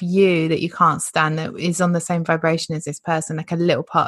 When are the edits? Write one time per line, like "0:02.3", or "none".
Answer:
none